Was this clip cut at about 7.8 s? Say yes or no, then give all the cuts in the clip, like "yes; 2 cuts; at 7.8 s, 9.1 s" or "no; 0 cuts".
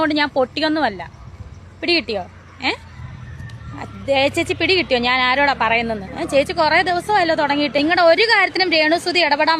yes; 1 cut; at 7.8 s